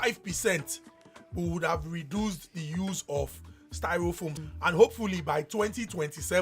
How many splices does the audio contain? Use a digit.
1